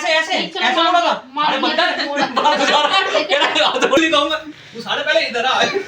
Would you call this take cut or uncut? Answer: cut